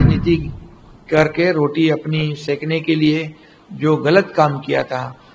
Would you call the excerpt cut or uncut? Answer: uncut